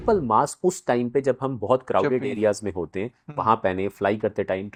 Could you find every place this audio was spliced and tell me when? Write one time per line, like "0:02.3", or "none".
none